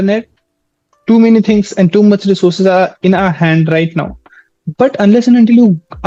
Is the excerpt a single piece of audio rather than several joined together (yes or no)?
yes